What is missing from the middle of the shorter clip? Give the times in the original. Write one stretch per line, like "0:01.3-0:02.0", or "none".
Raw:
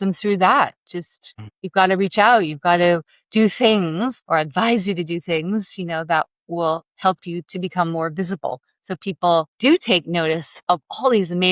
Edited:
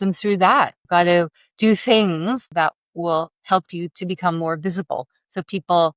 0:00.8-0:02.5
0:04.2-0:06.0